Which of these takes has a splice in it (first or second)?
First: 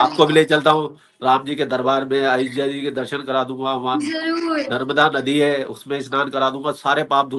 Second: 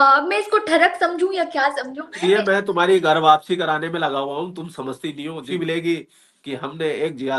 second